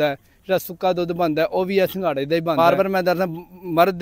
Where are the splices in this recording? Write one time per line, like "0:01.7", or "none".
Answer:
0:02.5